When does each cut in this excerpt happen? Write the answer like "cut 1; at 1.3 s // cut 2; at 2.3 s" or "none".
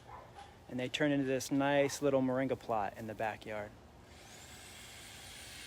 none